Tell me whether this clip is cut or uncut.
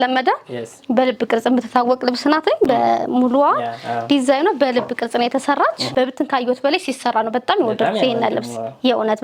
uncut